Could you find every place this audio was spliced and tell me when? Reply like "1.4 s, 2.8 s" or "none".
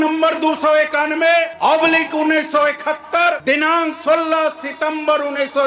1.5 s, 3.4 s